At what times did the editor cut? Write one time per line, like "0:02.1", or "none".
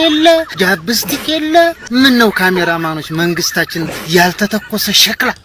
none